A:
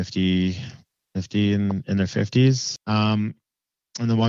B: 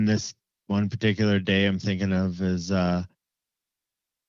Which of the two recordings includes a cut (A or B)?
A